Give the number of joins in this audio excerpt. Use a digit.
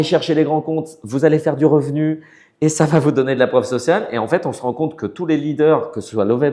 0